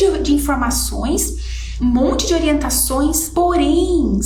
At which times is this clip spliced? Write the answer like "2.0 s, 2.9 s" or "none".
none